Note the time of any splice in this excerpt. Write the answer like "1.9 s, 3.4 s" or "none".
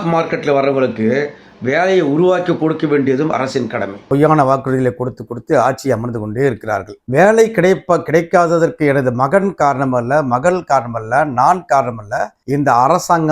4.0 s, 6.9 s

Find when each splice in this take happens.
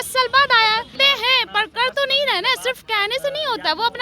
0.9 s

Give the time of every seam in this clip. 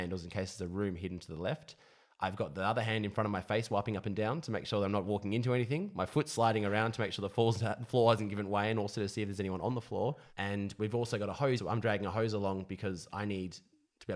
10.3 s, 11.6 s

